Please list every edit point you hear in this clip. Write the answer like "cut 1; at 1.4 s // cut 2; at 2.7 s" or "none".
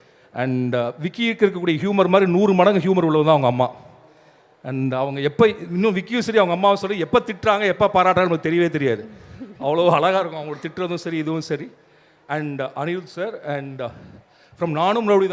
none